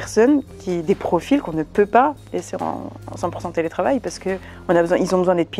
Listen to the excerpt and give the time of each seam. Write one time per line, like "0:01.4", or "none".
none